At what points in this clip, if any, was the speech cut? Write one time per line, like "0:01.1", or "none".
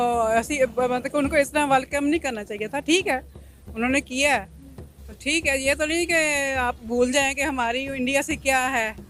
none